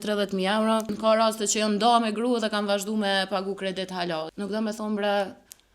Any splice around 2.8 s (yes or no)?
no